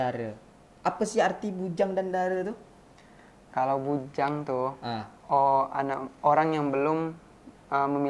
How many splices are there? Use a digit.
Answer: 0